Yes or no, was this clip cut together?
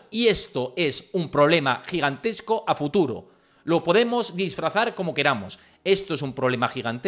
no